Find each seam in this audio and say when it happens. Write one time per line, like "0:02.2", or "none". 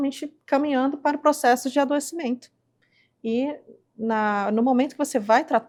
none